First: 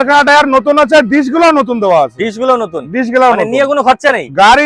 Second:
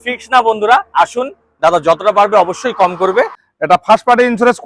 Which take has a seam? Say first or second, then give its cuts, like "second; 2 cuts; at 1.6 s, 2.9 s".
second; 1 cut; at 3.4 s